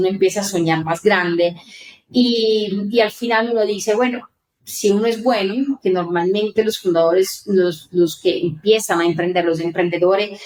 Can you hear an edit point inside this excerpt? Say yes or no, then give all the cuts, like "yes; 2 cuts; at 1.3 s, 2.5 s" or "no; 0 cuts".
no; 0 cuts